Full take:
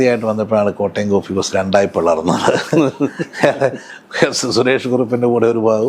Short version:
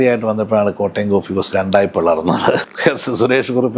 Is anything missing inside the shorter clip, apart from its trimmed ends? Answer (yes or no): yes